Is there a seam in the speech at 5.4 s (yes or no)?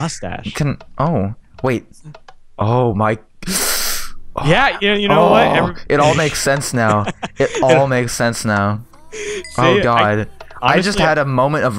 yes